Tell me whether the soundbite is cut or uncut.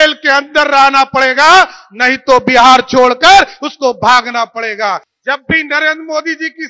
cut